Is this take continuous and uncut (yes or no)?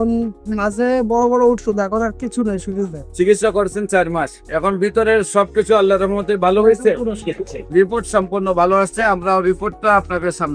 no